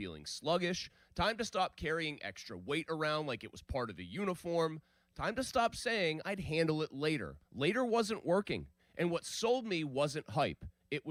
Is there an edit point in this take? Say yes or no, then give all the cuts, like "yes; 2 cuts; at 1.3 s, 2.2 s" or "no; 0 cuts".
no; 0 cuts